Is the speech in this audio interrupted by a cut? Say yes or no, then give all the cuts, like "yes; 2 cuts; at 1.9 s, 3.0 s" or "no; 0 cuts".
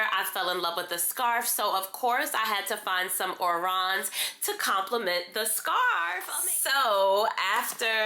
yes; 1 cut; at 6.3 s